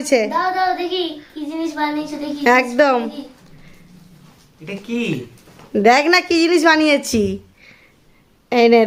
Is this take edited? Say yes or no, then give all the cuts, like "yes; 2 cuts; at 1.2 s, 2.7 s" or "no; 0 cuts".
no; 0 cuts